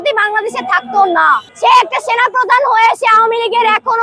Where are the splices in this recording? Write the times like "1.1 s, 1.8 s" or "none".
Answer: 1.5 s